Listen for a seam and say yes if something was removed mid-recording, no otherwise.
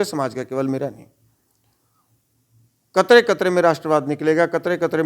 no